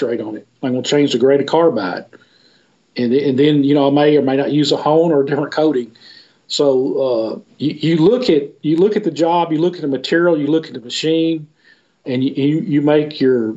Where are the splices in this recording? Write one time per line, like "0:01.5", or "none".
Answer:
0:07.4
0:12.0